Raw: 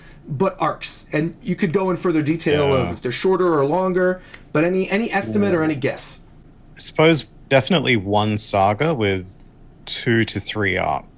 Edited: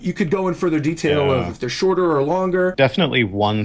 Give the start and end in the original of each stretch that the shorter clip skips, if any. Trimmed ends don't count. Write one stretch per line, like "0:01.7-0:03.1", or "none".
0:04.2-0:07.5